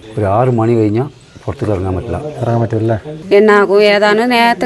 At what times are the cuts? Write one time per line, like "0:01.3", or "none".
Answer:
0:03.1